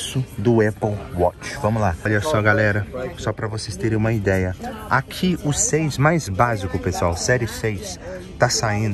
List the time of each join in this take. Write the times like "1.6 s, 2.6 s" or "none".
2.0 s, 4.6 s